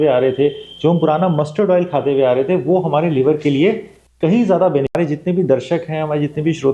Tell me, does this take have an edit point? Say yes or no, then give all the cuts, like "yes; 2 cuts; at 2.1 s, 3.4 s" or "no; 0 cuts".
yes; 1 cut; at 4.9 s